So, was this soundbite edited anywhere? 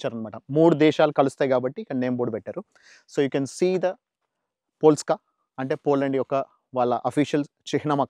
no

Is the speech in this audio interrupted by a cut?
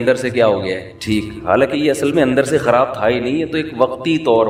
no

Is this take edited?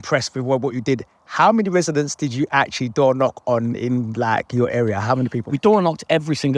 no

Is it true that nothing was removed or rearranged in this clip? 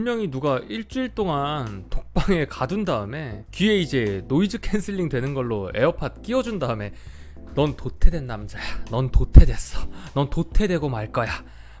yes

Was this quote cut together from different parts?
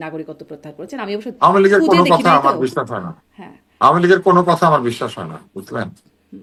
no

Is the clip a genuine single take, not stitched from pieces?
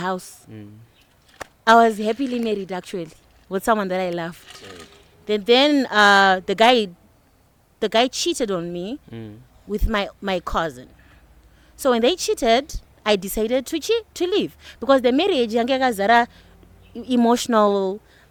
yes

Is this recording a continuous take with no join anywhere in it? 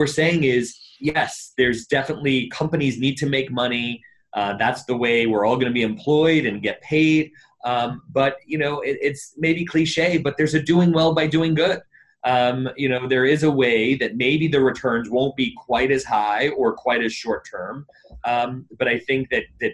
yes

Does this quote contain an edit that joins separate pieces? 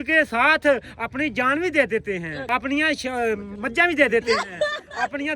yes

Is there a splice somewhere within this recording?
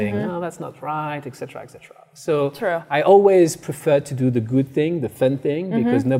no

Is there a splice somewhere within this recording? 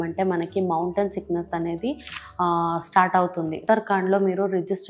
yes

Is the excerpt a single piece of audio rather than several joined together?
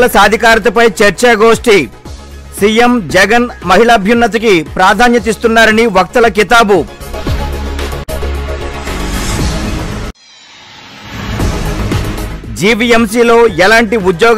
no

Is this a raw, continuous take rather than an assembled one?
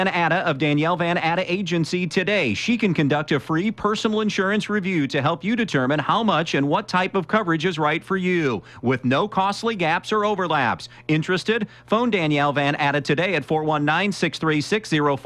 yes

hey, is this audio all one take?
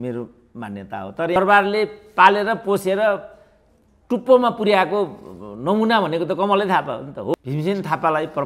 no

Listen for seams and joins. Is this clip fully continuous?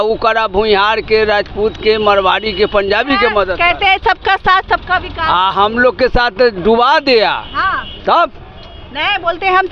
yes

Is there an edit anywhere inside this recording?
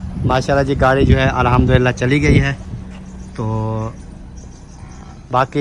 no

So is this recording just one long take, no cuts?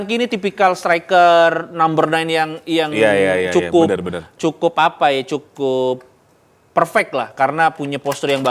yes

